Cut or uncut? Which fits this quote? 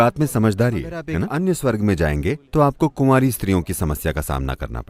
cut